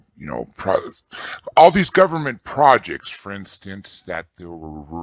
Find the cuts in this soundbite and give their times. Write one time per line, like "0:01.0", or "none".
0:02.4